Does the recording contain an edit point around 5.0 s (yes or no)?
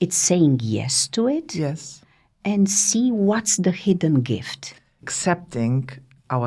yes